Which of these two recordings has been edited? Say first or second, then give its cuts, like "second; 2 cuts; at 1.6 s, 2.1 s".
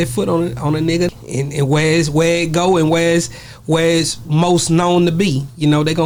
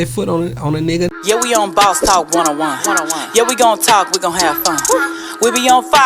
second; 1 cut; at 1.2 s